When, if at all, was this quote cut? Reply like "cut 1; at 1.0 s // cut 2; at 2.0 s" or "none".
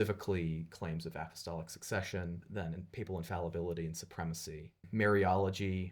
cut 1; at 2.4 s // cut 2; at 4.8 s

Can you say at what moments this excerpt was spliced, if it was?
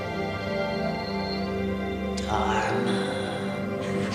cut 1; at 1.2 s

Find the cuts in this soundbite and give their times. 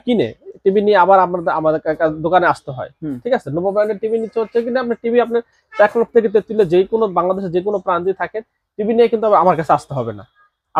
none

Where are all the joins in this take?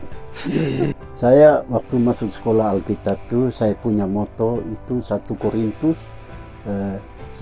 cut 1; at 0.9 s

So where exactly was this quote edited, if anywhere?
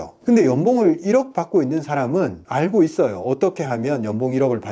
none

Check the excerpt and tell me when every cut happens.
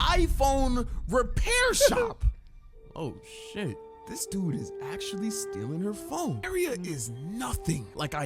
cut 1; at 3.9 s // cut 2; at 6.4 s

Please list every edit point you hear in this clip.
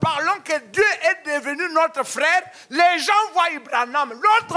none

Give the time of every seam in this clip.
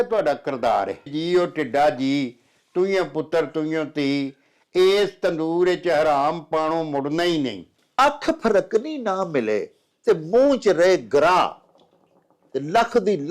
cut 1; at 1.1 s // cut 2; at 7.6 s

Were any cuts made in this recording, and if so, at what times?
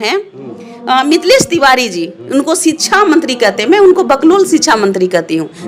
none

